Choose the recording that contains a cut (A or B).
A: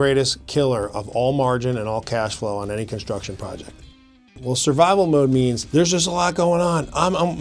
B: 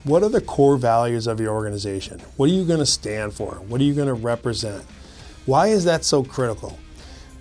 A